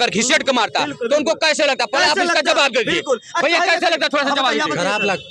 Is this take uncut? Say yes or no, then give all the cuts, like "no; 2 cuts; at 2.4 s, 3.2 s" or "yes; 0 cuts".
yes; 0 cuts